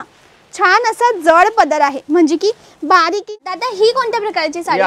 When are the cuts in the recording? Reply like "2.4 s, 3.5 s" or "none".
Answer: 3.2 s

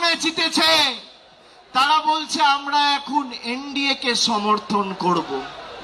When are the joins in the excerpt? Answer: none

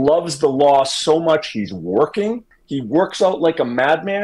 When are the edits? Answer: none

